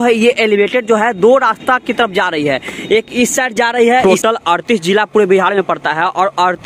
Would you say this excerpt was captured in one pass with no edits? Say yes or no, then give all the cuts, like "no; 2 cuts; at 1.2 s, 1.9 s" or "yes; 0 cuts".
no; 1 cut; at 4.0 s